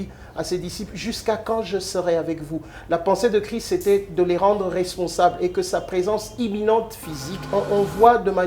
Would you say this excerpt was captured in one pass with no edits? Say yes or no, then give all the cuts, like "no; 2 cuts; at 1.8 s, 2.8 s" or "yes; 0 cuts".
no; 1 cut; at 7.5 s